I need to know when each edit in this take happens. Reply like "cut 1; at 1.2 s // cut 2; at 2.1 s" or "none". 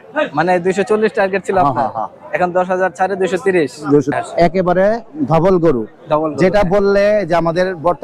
cut 1; at 4.1 s